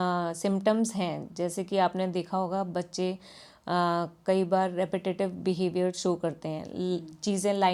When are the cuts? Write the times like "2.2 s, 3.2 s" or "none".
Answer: none